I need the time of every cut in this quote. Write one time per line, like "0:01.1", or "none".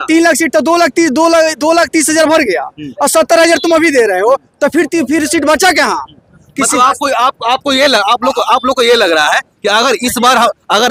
none